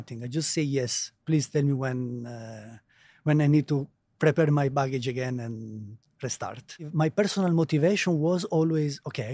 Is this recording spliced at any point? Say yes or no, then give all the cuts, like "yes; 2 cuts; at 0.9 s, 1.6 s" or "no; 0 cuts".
yes; 1 cut; at 6.9 s